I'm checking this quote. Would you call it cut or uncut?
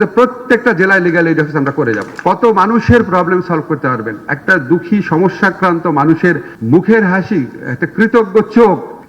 cut